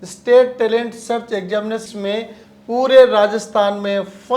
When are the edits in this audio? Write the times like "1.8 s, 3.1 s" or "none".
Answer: 1.8 s